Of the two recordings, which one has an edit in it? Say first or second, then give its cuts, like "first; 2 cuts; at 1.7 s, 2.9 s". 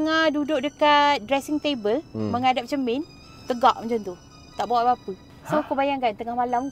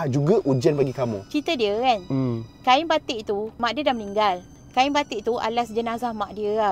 second; 1 cut; at 1.2 s